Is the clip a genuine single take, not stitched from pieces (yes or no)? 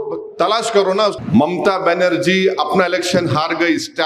no